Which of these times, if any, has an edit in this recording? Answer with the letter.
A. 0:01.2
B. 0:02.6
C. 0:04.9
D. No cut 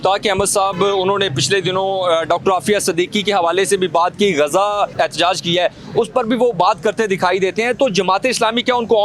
C